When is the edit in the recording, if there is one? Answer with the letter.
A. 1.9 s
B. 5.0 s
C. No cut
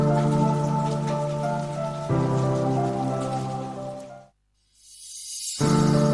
B